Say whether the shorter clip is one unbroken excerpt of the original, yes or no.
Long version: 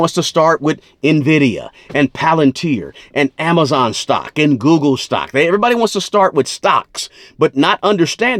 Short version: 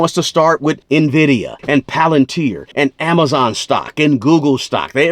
no